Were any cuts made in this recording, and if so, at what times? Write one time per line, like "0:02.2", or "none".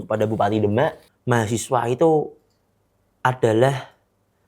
0:01.1